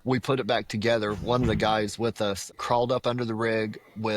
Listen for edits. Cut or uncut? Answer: cut